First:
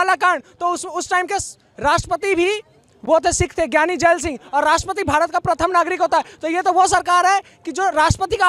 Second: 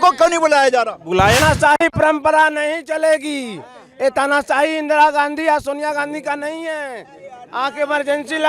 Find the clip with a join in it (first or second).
second